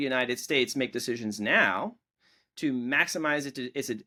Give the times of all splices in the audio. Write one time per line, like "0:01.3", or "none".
none